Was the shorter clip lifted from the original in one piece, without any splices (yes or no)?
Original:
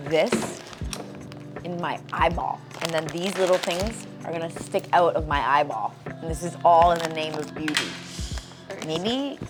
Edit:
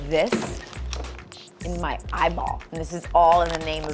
no